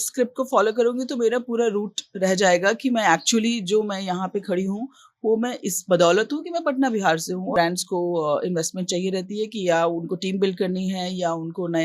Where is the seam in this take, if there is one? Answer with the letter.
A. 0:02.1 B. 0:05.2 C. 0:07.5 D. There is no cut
C